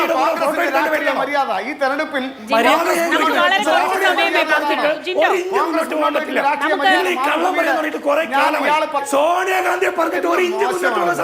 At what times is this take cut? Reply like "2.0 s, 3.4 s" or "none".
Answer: 9.0 s